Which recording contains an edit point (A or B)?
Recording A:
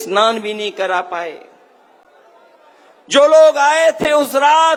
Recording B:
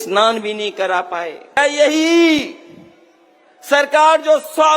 B